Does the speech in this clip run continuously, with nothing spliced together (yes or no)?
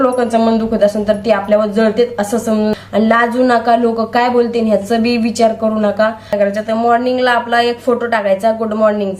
no